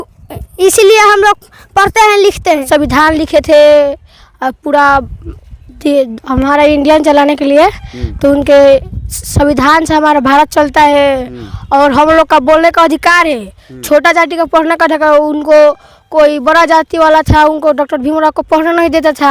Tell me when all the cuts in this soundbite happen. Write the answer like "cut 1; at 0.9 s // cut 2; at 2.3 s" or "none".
cut 1; at 2.7 s